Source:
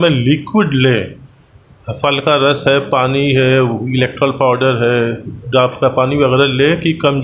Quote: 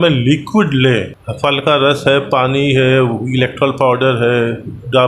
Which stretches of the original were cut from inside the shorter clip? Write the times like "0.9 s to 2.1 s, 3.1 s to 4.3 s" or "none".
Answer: 1.2 s to 1.8 s